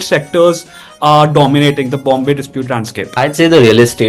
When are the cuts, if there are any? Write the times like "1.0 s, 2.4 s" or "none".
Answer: 3.1 s